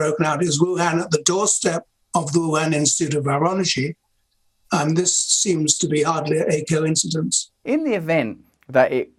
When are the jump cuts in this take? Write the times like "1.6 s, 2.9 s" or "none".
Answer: 7.5 s